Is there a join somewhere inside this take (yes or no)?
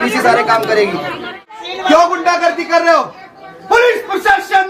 yes